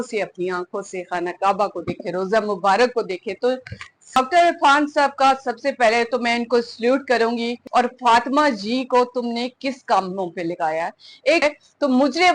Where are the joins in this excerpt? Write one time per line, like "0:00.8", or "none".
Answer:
0:04.2
0:07.6
0:11.4